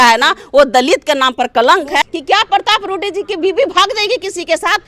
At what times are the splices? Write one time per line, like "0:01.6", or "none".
0:02.0